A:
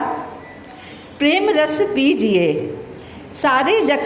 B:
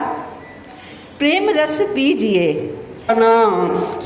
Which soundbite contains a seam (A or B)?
B